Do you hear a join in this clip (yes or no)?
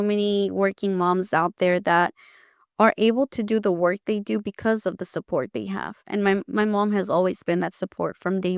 no